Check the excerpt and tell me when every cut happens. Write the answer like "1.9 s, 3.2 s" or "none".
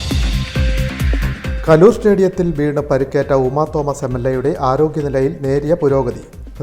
1.1 s